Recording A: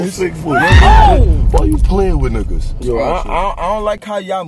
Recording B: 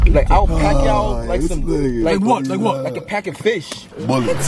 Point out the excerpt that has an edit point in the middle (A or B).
A